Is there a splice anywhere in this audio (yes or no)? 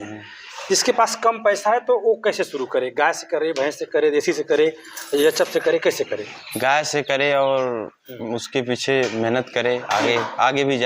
no